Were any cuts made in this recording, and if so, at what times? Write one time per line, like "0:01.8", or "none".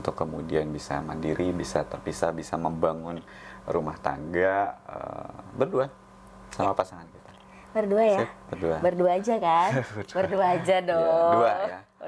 none